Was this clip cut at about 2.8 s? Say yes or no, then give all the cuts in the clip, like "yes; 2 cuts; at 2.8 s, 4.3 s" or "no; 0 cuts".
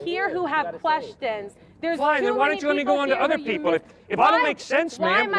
no; 0 cuts